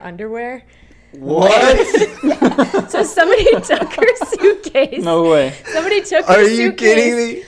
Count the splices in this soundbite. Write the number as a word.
zero